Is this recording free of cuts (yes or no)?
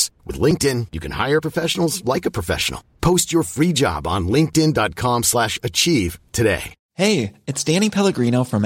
no